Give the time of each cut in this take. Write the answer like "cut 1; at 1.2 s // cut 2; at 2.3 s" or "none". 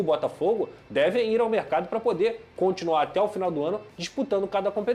none